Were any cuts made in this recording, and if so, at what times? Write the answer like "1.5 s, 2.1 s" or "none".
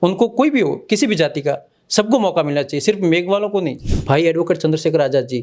3.8 s